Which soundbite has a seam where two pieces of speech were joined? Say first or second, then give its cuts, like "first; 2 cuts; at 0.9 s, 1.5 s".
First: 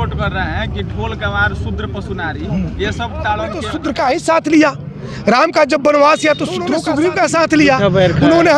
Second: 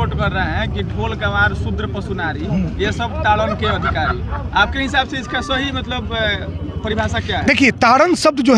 first; 2 cuts; at 3.8 s, 6.8 s